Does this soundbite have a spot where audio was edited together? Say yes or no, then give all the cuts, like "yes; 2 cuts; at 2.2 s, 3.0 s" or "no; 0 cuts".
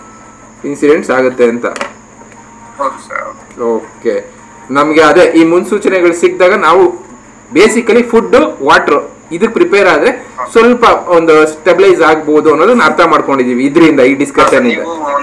no; 0 cuts